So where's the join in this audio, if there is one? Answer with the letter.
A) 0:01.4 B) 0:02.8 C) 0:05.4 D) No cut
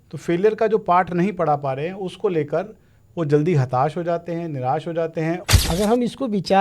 C